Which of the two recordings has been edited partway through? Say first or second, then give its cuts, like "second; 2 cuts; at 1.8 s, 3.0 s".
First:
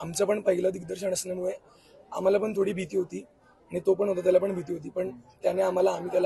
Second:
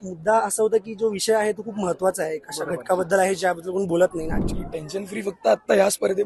second; 1 cut; at 4.4 s